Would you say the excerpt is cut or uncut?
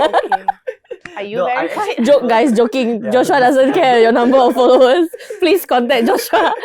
uncut